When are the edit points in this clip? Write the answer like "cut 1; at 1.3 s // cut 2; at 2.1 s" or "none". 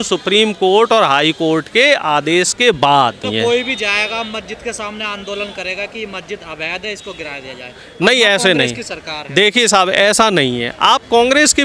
cut 1; at 3.2 s